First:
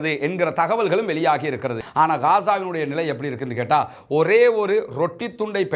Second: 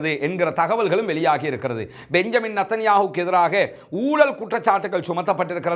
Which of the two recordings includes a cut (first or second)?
first